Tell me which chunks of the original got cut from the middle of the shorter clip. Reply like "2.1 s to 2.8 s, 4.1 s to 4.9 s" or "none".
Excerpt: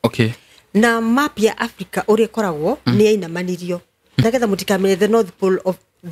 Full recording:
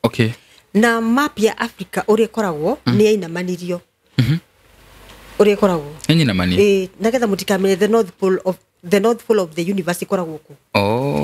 4.2 s to 7.0 s